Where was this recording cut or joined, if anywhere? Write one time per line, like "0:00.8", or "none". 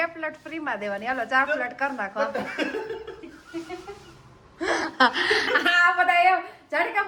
none